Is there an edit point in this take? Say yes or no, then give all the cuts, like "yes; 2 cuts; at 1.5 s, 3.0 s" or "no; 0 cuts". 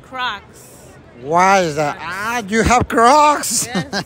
no; 0 cuts